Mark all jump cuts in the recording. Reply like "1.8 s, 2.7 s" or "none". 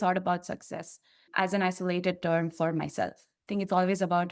1.2 s